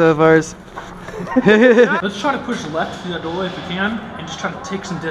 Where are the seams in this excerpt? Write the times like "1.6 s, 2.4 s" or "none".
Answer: 2.0 s

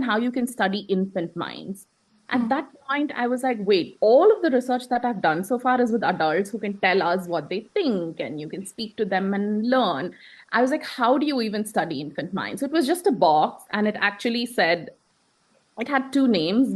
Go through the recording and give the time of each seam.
none

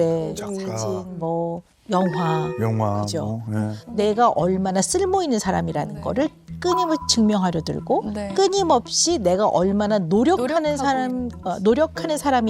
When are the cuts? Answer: 3.8 s

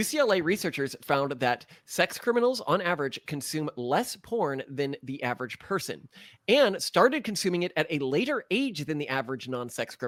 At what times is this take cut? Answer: none

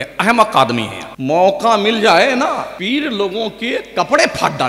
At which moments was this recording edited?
1.0 s, 2.7 s

